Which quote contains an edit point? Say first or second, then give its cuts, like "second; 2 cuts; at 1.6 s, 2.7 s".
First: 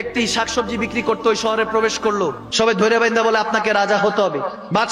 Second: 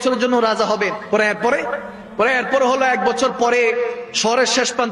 first; 1 cut; at 2.4 s